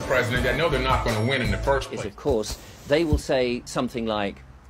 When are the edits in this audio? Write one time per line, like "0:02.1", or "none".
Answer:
0:01.9